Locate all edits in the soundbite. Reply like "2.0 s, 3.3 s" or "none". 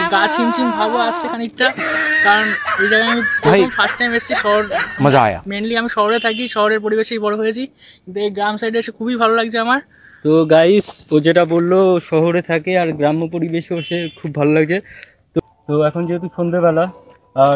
15.4 s